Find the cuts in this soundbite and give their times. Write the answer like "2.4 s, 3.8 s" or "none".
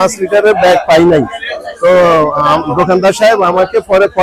none